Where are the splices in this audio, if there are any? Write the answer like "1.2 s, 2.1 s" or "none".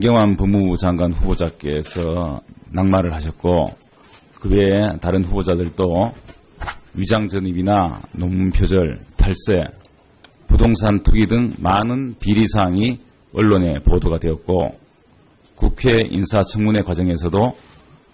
none